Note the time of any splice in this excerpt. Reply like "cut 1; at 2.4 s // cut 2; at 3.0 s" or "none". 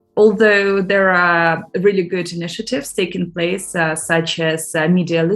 none